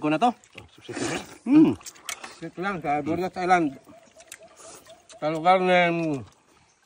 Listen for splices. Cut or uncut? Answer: cut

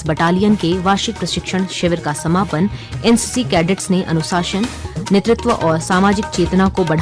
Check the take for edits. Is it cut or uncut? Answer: uncut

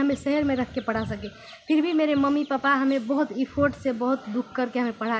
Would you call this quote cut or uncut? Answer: uncut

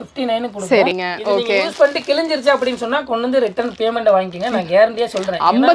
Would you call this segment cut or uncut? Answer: cut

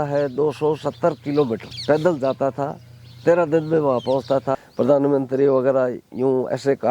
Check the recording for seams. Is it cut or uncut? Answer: cut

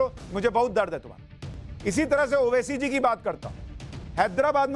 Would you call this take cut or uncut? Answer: cut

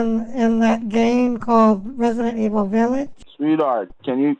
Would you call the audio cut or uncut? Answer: cut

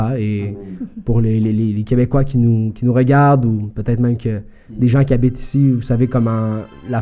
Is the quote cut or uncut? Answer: uncut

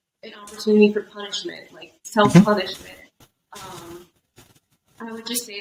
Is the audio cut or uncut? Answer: uncut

